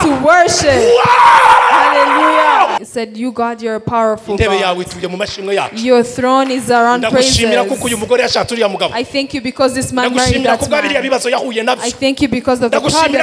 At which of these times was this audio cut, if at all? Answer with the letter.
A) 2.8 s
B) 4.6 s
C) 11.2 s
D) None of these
A